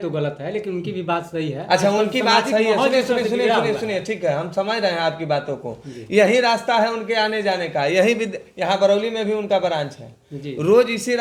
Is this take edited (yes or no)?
no